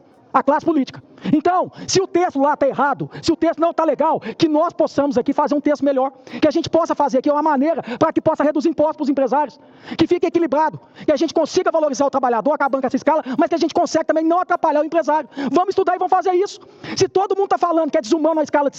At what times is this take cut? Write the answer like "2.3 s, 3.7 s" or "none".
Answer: none